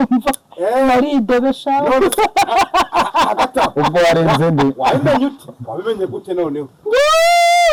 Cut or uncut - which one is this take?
uncut